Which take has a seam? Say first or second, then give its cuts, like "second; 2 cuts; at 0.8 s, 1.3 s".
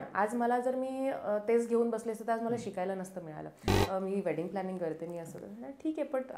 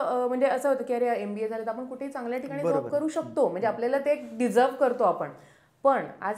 first; 1 cut; at 3.7 s